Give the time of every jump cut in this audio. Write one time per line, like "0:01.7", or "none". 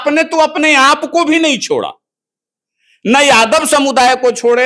none